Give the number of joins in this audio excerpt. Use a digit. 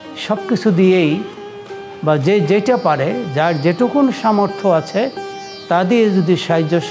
0